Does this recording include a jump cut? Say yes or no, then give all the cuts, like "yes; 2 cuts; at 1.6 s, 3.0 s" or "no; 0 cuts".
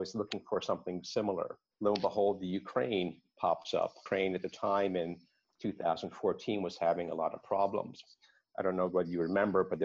yes; 1 cut; at 1.6 s